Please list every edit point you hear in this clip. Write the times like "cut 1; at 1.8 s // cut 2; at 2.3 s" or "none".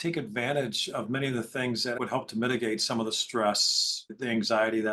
cut 1; at 1.9 s